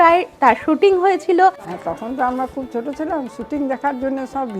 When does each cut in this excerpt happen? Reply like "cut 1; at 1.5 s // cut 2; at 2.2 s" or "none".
cut 1; at 1.7 s